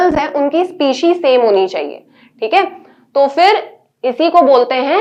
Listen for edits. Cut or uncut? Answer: uncut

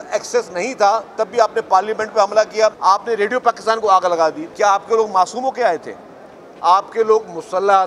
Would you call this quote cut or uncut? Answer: cut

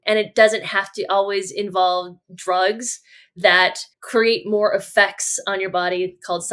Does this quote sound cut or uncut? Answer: cut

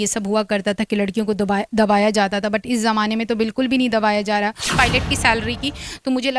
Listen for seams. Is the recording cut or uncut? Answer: cut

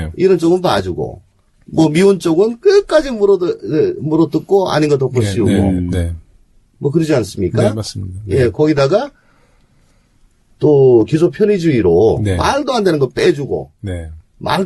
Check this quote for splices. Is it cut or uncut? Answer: cut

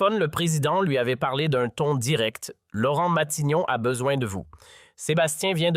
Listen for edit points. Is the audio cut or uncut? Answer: cut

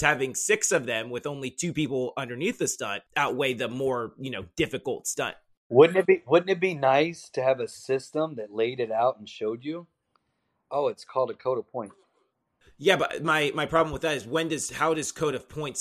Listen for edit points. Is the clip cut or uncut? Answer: cut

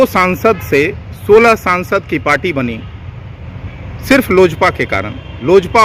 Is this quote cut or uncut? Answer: uncut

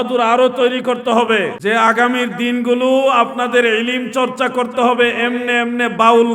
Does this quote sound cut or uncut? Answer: cut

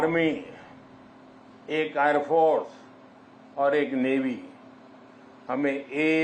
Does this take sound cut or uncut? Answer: uncut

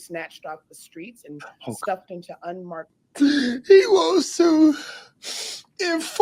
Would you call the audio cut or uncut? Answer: cut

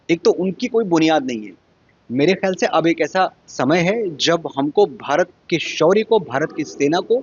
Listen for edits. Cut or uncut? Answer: uncut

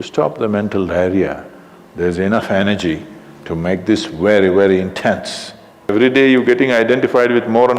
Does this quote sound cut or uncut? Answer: cut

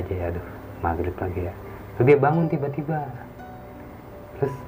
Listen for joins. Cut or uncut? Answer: uncut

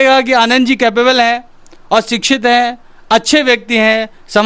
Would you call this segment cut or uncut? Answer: uncut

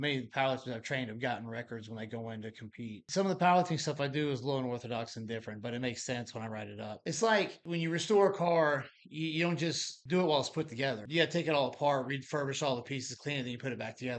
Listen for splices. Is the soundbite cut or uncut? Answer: cut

